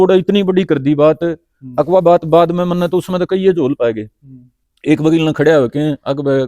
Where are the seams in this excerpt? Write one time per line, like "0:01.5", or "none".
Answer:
none